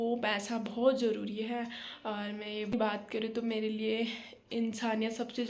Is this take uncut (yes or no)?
no